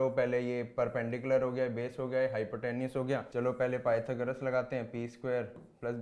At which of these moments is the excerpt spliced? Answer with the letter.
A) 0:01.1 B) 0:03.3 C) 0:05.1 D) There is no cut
B